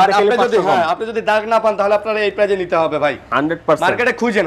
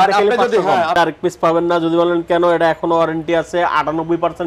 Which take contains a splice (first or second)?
second